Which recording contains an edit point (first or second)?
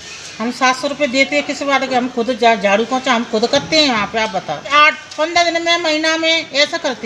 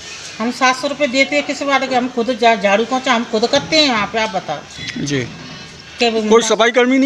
first